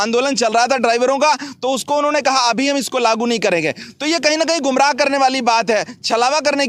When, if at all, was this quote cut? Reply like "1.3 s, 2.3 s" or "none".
none